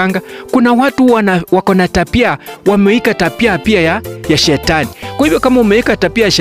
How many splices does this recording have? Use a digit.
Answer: 0